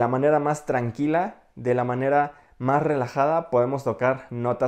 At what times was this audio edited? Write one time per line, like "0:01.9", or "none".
none